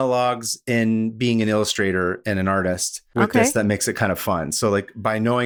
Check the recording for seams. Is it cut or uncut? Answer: uncut